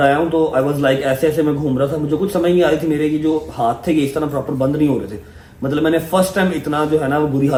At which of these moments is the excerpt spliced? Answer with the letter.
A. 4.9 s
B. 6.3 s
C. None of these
C